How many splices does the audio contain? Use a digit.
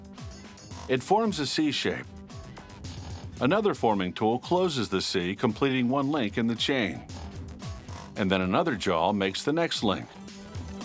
1